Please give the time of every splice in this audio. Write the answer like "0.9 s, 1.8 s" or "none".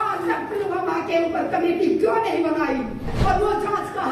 3.1 s